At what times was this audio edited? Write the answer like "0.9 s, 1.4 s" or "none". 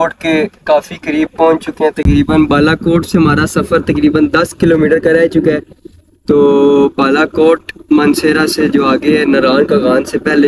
none